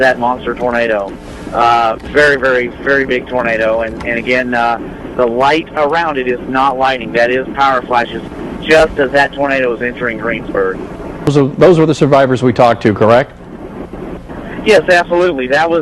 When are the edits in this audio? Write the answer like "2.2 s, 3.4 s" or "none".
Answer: 11.3 s